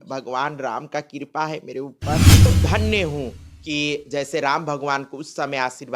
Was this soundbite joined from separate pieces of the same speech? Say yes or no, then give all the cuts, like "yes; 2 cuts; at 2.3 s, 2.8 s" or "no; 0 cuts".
yes; 1 cut; at 2.3 s